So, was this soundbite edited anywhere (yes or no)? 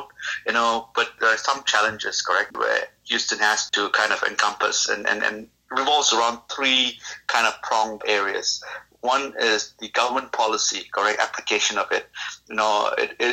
yes